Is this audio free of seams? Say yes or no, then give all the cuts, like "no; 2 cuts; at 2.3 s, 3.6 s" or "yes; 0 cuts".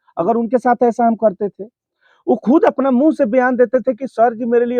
yes; 0 cuts